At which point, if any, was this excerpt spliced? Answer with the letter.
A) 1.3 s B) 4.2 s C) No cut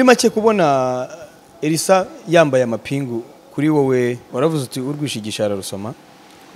B